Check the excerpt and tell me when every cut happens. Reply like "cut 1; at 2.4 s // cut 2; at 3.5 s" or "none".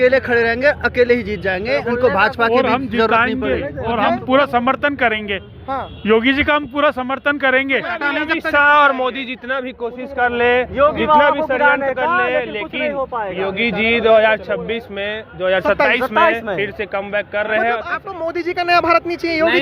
cut 1; at 7.9 s // cut 2; at 17.9 s